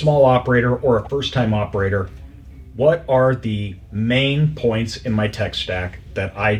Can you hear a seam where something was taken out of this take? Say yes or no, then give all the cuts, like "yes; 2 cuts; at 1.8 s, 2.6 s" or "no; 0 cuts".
no; 0 cuts